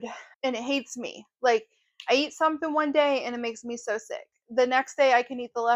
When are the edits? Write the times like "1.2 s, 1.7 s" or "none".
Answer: none

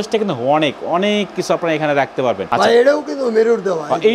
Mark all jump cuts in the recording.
none

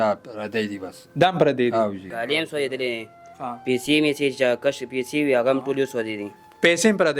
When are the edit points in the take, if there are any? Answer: 2.1 s

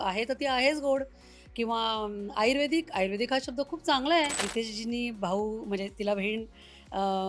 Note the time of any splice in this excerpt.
4.4 s

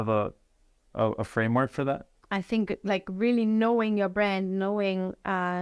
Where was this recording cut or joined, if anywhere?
2.1 s

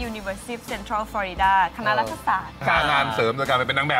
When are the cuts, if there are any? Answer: 2.6 s

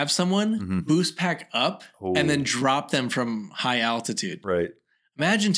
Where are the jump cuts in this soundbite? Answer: none

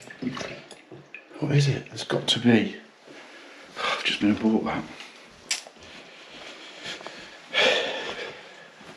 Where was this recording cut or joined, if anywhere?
none

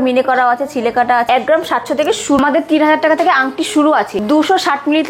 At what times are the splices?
1.3 s, 2.4 s

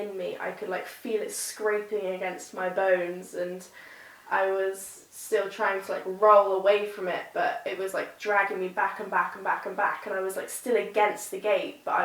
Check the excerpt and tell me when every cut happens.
none

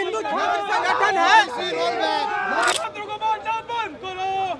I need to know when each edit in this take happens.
2.7 s

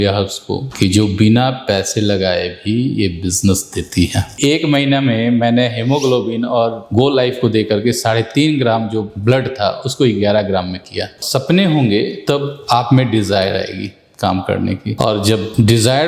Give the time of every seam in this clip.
4.4 s, 11.2 s

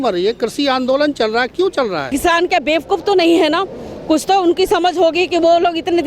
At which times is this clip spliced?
2.1 s

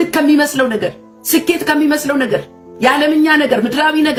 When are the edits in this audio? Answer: none

